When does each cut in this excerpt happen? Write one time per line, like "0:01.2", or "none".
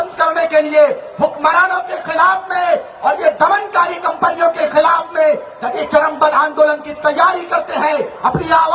none